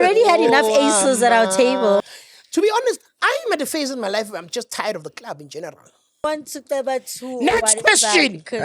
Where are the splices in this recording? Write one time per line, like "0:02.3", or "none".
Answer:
0:02.0
0:06.2